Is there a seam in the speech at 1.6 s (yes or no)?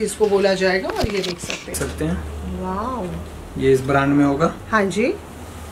yes